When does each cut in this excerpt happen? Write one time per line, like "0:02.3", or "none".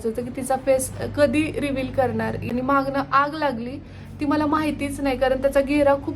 0:02.5